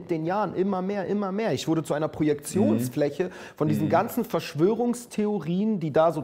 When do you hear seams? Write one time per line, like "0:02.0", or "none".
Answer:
0:01.9